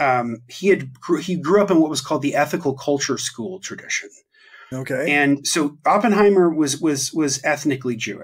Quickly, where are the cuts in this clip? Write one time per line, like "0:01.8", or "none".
none